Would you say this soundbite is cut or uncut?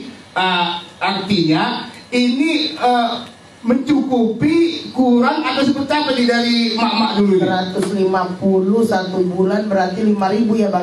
uncut